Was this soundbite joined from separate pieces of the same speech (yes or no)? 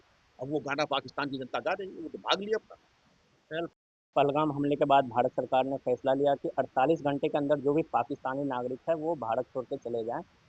no